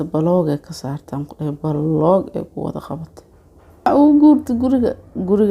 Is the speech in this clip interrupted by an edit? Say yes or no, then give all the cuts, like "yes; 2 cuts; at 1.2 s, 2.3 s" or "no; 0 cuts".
yes; 1 cut; at 3.9 s